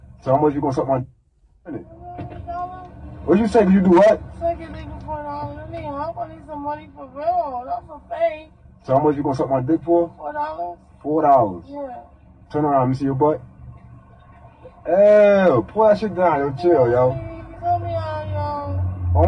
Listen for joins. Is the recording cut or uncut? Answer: cut